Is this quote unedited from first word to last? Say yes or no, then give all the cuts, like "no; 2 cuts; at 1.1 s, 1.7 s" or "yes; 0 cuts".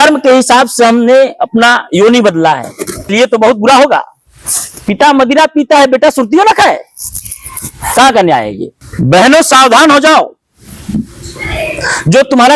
no; 2 cuts; at 2.9 s, 8.7 s